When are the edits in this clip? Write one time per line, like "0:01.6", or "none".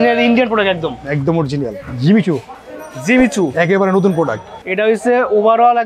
0:01.9
0:04.5